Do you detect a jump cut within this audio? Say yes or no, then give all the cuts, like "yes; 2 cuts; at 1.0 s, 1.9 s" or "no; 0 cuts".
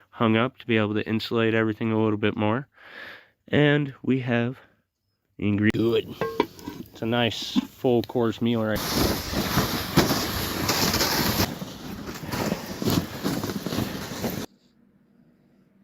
yes; 1 cut; at 5.7 s